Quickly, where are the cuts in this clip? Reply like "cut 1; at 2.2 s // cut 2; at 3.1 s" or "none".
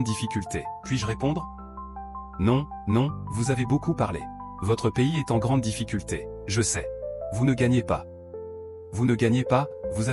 none